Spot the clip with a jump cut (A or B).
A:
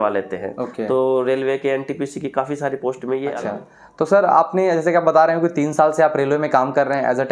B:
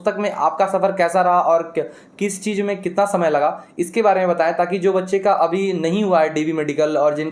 A